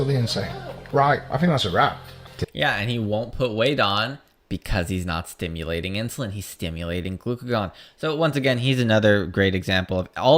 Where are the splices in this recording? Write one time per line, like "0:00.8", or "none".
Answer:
0:02.2